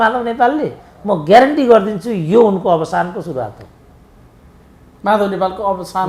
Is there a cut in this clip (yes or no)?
no